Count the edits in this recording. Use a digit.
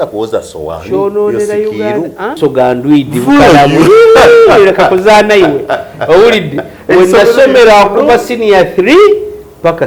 1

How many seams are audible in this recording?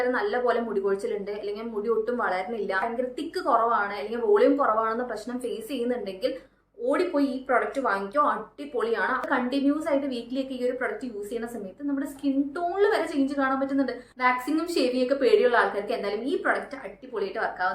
3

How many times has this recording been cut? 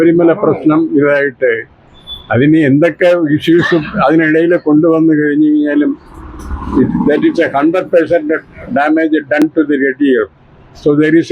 1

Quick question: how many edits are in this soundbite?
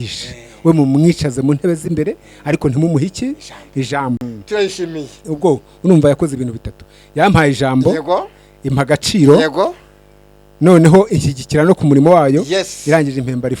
1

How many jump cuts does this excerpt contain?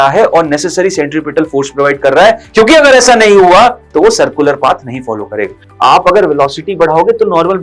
1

